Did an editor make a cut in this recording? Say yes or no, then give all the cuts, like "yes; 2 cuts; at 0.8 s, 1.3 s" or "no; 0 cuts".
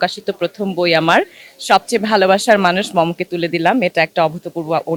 no; 0 cuts